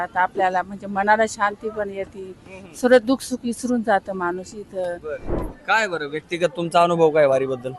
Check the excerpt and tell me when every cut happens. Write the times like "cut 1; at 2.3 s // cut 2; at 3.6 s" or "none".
cut 1; at 5.3 s